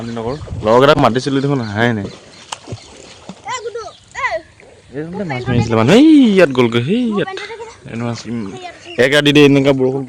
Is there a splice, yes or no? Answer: no